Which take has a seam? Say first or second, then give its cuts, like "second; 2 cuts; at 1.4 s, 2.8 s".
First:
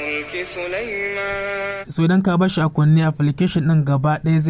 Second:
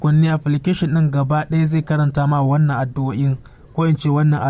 first; 1 cut; at 1.8 s